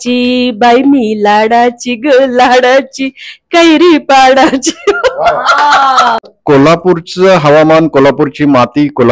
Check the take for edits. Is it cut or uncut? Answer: cut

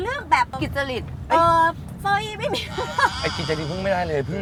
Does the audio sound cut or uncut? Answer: uncut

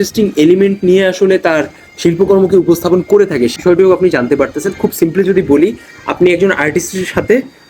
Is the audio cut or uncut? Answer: cut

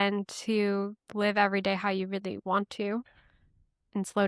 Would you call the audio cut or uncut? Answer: uncut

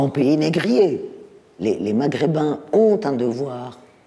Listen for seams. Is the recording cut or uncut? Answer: cut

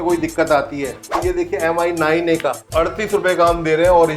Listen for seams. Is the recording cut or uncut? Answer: cut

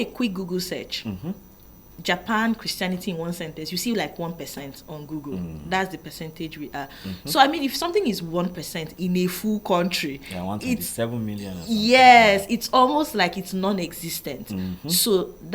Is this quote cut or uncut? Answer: uncut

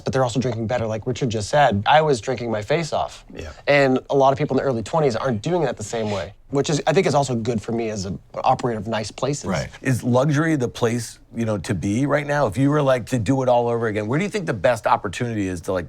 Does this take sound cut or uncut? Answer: cut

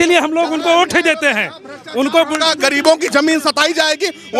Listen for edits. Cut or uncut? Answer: uncut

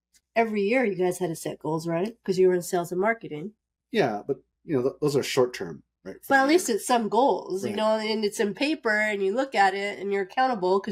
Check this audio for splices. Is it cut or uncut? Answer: uncut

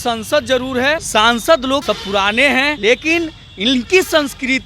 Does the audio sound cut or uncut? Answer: cut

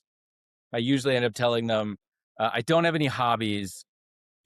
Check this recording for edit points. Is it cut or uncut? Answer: uncut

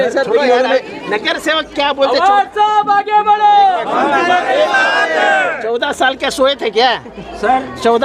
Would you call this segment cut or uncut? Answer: uncut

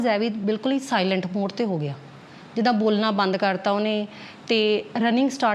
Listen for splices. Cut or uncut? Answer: uncut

